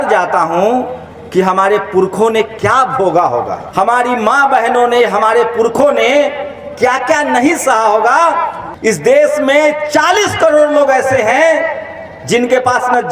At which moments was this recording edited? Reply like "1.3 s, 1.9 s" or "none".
3.6 s, 8.6 s